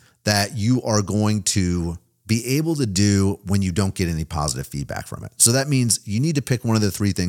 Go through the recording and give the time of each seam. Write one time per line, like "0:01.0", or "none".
0:02.1

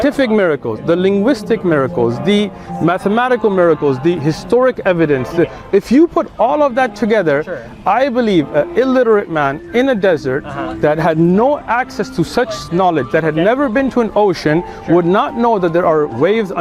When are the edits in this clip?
none

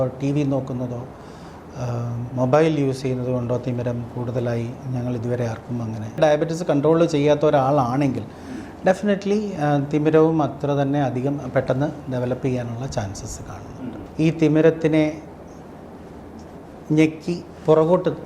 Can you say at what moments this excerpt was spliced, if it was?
0:06.2
0:14.0

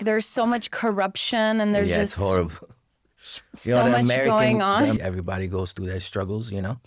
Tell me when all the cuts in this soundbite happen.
0:05.0

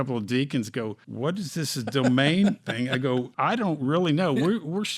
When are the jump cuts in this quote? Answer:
0:01.0
0:03.3

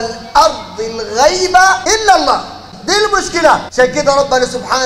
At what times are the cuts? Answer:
0:01.8
0:02.7
0:03.7

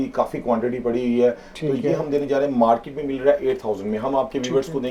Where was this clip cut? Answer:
none

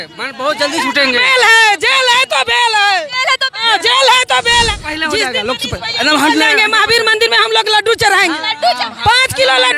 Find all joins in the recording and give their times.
0:04.7

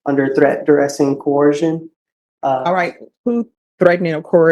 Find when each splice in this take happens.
none

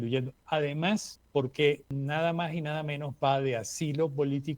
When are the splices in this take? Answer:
0:01.2
0:01.9

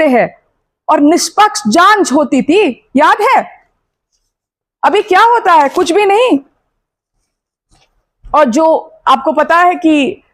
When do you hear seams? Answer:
none

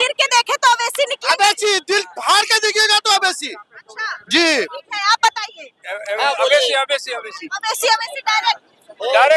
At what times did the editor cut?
none

